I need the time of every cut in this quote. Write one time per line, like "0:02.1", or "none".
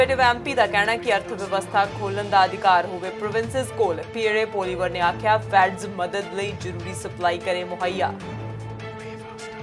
none